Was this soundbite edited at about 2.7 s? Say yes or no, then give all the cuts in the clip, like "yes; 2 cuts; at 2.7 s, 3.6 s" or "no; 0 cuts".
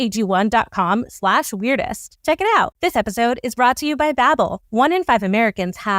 yes; 1 cut; at 2.7 s